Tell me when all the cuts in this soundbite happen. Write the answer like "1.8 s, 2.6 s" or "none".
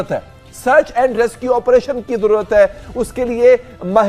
none